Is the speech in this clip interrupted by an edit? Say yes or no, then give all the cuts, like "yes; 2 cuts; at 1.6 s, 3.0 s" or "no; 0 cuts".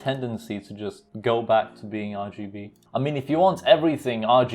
yes; 1 cut; at 1.1 s